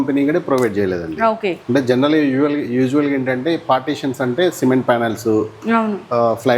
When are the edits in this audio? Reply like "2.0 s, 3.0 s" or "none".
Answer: none